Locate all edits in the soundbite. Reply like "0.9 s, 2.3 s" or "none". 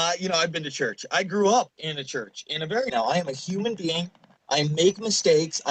none